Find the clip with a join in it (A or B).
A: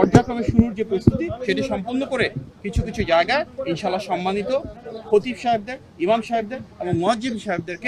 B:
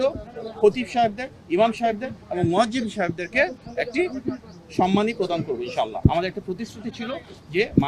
B